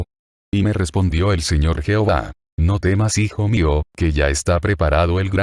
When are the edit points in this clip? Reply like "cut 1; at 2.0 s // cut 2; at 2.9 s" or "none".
none